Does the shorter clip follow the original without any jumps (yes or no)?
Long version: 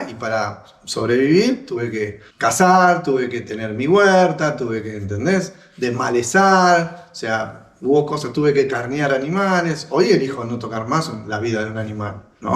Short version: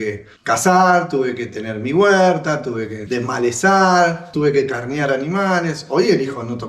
no